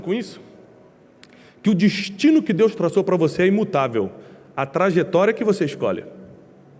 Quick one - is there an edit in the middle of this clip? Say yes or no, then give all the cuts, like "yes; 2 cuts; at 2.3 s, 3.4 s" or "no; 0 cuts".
no; 0 cuts